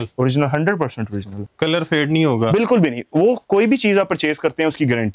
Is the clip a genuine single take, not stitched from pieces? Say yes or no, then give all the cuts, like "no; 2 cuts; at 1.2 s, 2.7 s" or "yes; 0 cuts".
no; 1 cut; at 1.3 s